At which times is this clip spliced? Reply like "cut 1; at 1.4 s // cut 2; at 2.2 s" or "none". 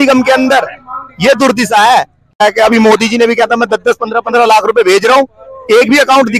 cut 1; at 2.4 s